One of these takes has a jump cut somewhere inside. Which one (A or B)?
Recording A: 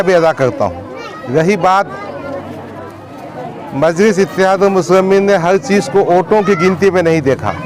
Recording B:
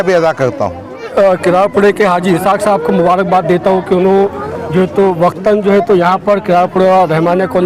B